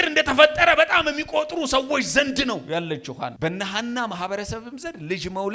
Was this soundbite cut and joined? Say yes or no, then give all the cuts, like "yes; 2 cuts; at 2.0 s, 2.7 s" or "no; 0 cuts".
yes; 1 cut; at 3.3 s